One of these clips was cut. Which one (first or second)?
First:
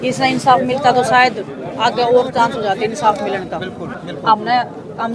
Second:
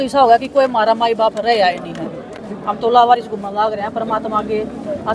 first